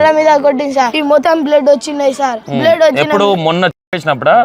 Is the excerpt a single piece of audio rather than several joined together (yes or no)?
no